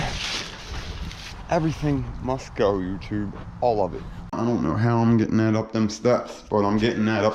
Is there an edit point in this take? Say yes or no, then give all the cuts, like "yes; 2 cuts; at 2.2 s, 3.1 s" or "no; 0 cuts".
yes; 2 cuts; at 1.3 s, 4.3 s